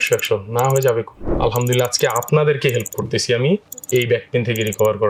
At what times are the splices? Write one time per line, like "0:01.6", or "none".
0:01.2